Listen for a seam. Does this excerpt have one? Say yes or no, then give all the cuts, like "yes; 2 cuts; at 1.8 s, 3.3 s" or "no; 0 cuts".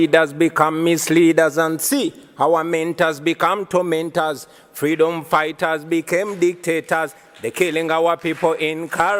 no; 0 cuts